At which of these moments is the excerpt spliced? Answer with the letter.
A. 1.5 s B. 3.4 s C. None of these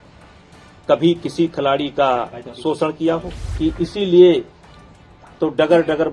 B